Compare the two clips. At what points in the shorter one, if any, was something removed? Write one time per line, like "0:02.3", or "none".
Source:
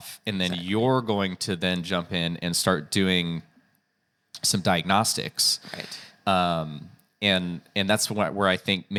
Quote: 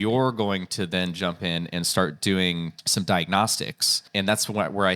0:02.8
0:04.0